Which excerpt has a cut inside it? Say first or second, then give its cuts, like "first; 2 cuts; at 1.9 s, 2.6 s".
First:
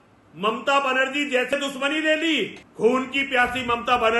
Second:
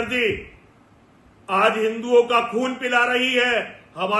first; 2 cuts; at 1.5 s, 2.6 s